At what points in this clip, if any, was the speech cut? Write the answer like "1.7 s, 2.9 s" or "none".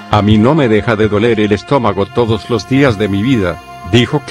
2.1 s